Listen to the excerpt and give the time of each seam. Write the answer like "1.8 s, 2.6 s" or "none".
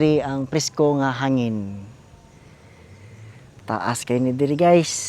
3.8 s